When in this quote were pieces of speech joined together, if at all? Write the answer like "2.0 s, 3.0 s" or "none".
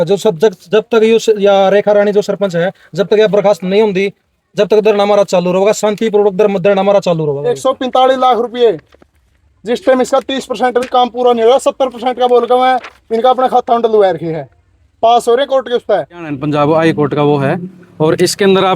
7.5 s, 16.4 s